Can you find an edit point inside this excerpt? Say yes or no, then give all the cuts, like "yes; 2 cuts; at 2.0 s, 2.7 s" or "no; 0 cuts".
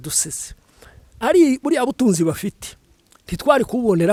no; 0 cuts